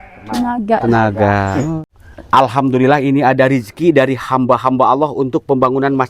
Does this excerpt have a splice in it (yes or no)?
yes